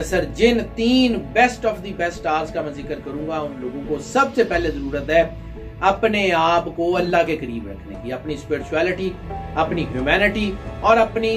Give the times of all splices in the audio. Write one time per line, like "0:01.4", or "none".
none